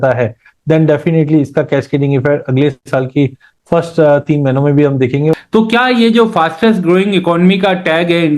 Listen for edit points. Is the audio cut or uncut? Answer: cut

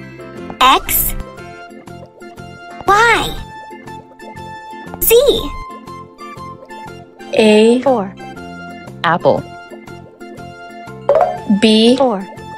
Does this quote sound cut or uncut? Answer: cut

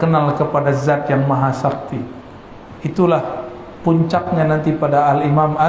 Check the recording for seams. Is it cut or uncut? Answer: uncut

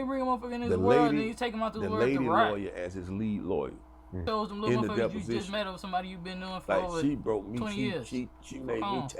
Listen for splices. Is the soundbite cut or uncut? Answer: cut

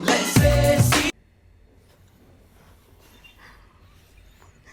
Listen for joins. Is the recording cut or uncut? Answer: uncut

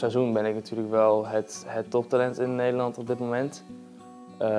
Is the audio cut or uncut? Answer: uncut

